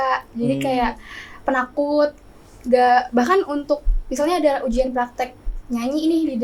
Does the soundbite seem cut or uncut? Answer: uncut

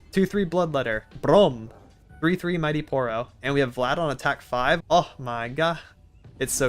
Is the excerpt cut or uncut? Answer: cut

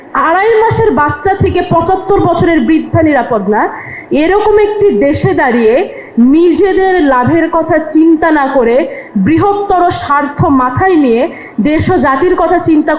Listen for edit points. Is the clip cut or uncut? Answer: uncut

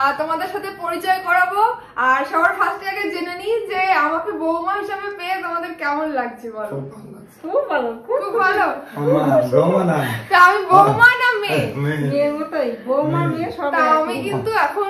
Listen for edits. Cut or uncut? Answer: uncut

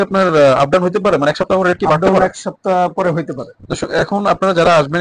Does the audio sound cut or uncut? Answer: uncut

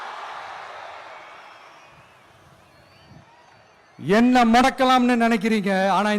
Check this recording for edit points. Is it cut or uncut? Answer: uncut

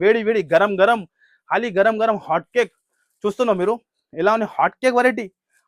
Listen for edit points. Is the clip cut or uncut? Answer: uncut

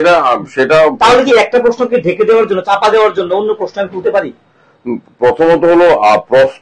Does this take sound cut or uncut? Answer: uncut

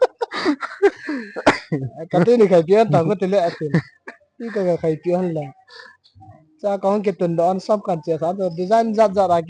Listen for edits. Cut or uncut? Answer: uncut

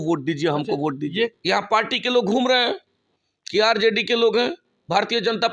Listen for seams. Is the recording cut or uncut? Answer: cut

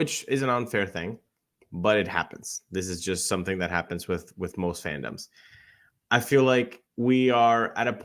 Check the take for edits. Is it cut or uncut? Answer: cut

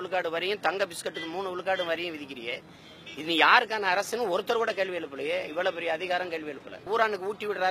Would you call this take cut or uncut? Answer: cut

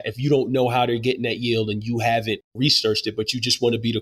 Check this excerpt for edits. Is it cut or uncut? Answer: cut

